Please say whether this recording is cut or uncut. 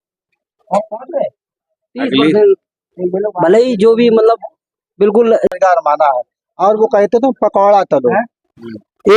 cut